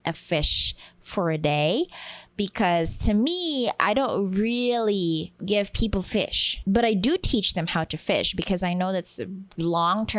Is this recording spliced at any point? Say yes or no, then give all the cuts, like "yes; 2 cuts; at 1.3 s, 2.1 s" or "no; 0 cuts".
yes; 2 cuts; at 5.3 s, 6.4 s